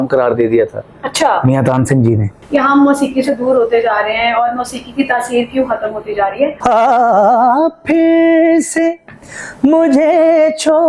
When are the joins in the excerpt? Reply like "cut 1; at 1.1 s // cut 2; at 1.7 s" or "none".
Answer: cut 1; at 2.3 s // cut 2; at 6.6 s

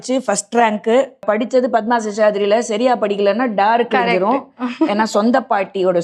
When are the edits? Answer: cut 1; at 1.2 s

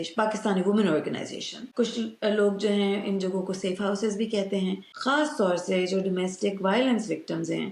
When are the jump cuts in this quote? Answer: cut 1; at 1.6 s // cut 2; at 4.9 s

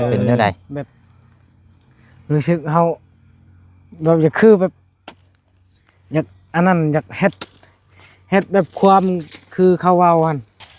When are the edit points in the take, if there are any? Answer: none

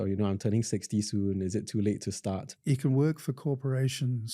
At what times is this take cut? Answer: cut 1; at 2.5 s

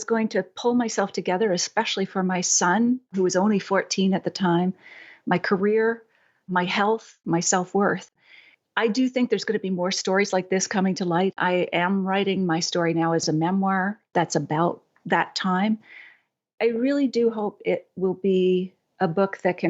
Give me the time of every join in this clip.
cut 1; at 7.1 s // cut 2; at 8.1 s // cut 3; at 11.3 s // cut 4; at 13.2 s

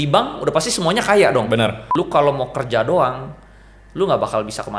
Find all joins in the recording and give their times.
cut 1; at 1.8 s

